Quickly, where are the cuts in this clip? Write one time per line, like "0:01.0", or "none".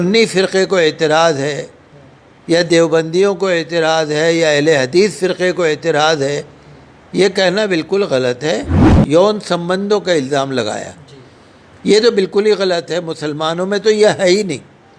0:08.9